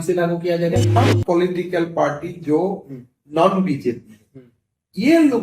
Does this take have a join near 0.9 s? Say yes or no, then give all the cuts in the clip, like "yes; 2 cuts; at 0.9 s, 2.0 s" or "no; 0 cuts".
yes; 1 cut; at 0.9 s